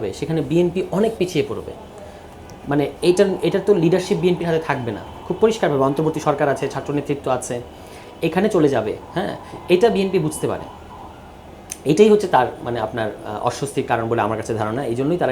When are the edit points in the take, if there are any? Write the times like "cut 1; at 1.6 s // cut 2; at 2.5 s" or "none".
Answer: none